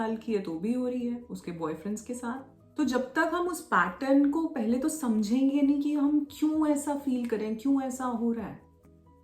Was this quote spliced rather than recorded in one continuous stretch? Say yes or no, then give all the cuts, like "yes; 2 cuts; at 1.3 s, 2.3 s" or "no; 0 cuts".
yes; 1 cut; at 2.6 s